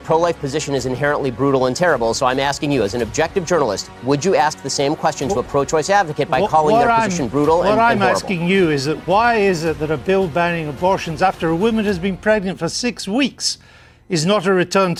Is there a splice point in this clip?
no; 0 cuts

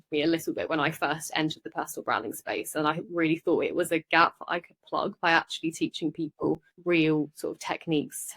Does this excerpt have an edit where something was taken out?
yes; 1 cut; at 6.7 s

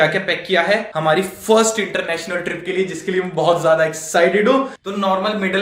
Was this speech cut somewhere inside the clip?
yes; 2 cuts; at 0.9 s, 4.7 s

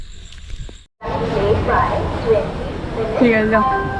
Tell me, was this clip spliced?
yes; 1 cut; at 1.0 s

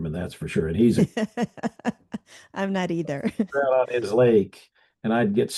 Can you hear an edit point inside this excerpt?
no; 0 cuts

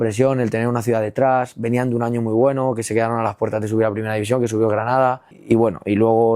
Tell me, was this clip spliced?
yes; 1 cut; at 5.3 s

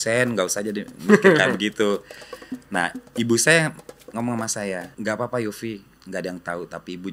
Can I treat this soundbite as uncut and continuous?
no; 2 cuts; at 4.9 s, 5.9 s

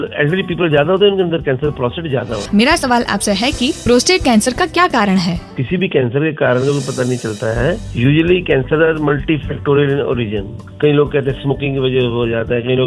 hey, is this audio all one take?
no; 1 cut; at 2.4 s

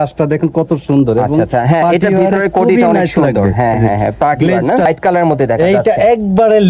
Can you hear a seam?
yes; 1 cut; at 4.9 s

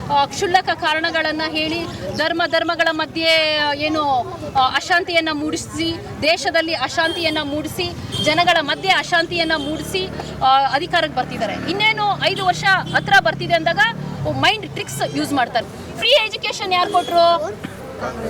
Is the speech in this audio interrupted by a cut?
yes; 1 cut; at 15.6 s

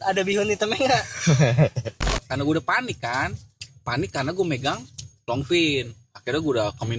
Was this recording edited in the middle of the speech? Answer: yes; 1 cut; at 2.2 s

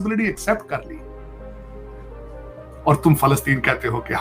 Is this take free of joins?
no; 2 cuts; at 1.1 s, 2.6 s

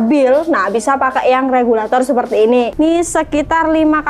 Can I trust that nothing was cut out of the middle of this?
no; 1 cut; at 2.7 s

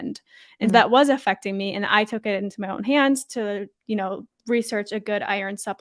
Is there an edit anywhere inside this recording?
no; 0 cuts

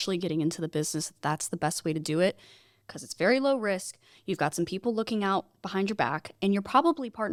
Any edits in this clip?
no; 0 cuts

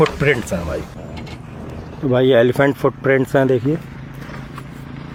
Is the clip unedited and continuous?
yes; 0 cuts

